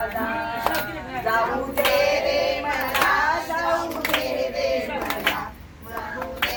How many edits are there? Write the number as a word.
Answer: zero